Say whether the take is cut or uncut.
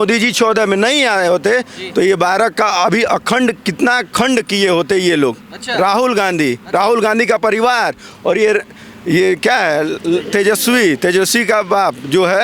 uncut